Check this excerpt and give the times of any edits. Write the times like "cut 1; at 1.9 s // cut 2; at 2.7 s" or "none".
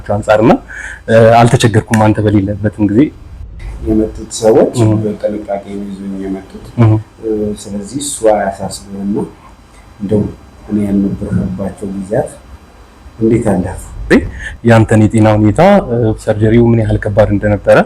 cut 1; at 3.4 s // cut 2; at 14.0 s